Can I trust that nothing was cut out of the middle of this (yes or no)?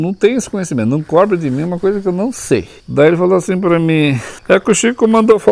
no